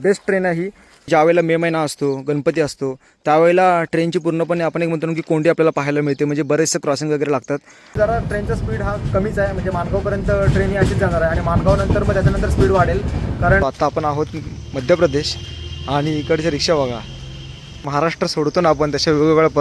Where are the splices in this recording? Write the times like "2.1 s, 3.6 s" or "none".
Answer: 1.1 s, 7.9 s, 13.6 s, 17.7 s

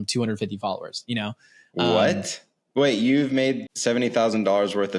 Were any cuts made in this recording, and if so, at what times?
3.7 s

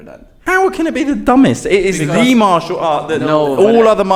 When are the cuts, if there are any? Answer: none

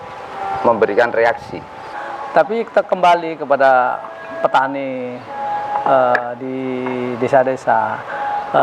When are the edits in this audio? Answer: 2.0 s

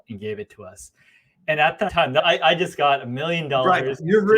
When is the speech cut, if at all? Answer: 2.0 s

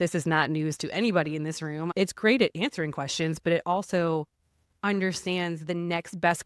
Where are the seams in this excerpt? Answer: 1.9 s

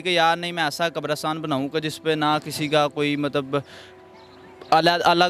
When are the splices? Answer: none

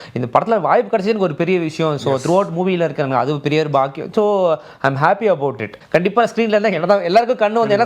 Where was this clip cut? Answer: 5.7 s

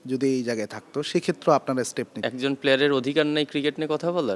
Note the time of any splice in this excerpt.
2.2 s

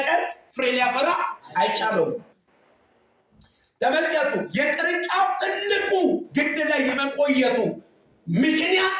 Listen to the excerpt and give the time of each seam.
none

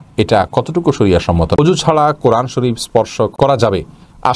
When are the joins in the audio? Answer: 1.6 s, 3.3 s

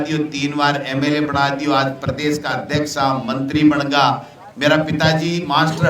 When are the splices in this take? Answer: none

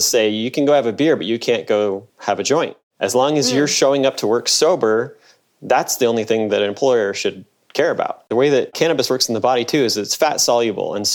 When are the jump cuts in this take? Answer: 2.1 s, 2.8 s

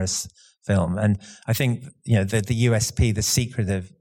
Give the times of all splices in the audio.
none

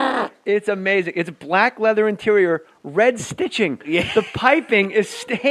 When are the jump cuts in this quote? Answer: 2.2 s

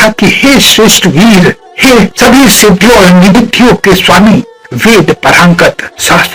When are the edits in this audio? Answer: none

